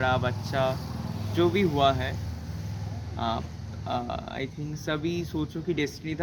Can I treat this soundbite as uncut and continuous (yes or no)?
yes